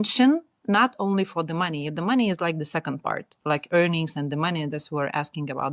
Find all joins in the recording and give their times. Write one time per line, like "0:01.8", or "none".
none